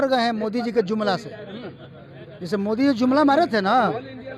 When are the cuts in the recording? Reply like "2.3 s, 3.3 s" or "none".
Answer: none